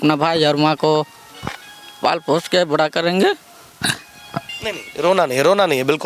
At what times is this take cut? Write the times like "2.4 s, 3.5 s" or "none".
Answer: none